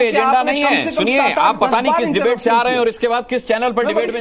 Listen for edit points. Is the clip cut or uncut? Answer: uncut